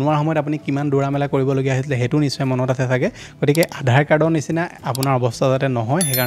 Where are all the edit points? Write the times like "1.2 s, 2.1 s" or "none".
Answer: none